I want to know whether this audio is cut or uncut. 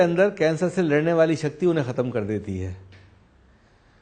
uncut